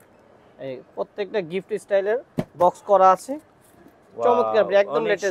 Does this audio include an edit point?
no; 0 cuts

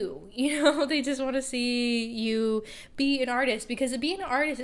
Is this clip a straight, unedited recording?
yes; 0 cuts

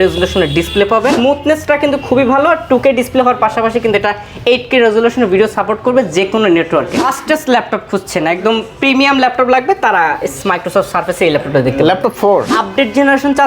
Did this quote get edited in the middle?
yes; 3 cuts; at 1.1 s, 7.0 s, 12.5 s

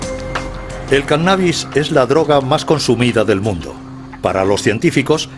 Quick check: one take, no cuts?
yes; 0 cuts

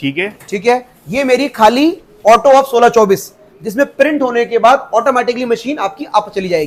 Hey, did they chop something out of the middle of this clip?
no; 0 cuts

